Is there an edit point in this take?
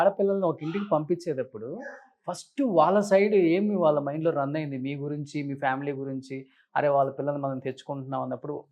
no; 0 cuts

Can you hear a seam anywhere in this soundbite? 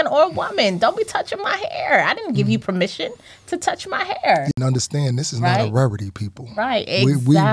yes; 1 cut; at 4.5 s

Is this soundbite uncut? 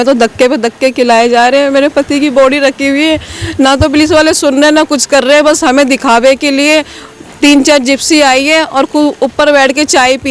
yes; 0 cuts

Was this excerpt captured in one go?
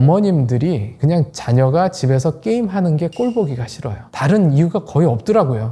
yes; 0 cuts

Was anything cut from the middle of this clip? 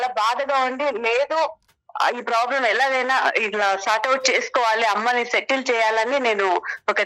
no; 0 cuts

